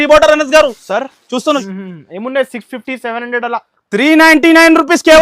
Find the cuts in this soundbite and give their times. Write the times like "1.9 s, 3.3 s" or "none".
1.6 s